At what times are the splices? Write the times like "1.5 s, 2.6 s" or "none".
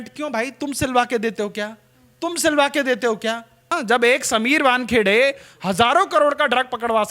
3.8 s